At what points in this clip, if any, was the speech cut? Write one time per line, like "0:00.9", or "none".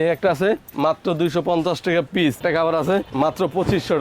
0:02.4